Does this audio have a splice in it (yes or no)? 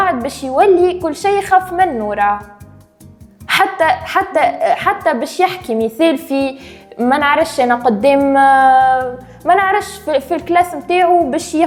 no